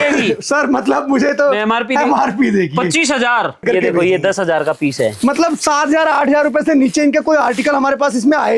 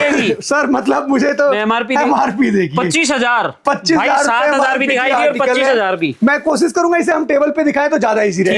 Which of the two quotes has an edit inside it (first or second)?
first